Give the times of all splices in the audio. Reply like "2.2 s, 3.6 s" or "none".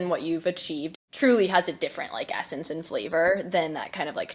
0.9 s